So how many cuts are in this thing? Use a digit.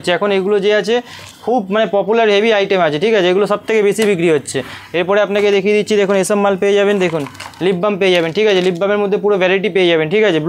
0